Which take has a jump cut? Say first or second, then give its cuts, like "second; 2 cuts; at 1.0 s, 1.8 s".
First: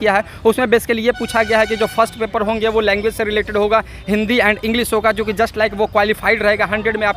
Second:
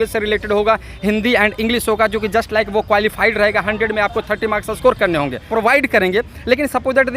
second; 1 cut; at 5.4 s